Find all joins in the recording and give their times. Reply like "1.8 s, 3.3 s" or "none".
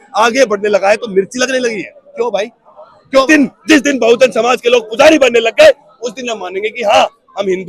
3.3 s